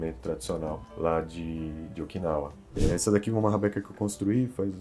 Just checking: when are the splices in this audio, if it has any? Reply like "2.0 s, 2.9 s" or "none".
2.7 s